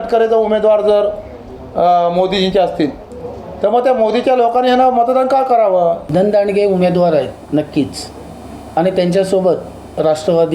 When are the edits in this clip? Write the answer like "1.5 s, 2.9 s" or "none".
6.0 s